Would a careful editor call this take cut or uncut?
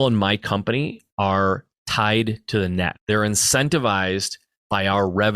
cut